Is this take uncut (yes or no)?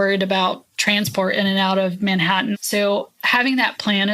no